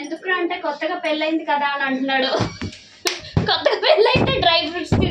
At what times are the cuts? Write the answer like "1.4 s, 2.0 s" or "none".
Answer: none